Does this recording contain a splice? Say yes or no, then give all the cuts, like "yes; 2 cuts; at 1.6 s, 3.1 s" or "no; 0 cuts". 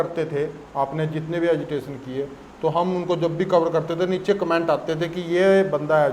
no; 0 cuts